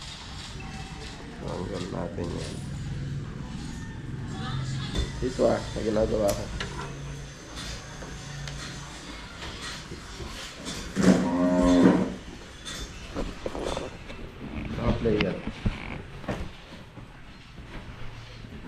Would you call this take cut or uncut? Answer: cut